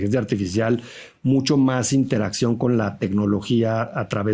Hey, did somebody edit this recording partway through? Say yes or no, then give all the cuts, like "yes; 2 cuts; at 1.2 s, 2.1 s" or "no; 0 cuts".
no; 0 cuts